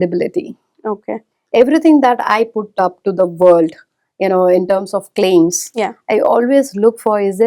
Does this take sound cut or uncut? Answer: uncut